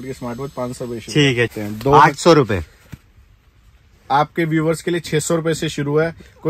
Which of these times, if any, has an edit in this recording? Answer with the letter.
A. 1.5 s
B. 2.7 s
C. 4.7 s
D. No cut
A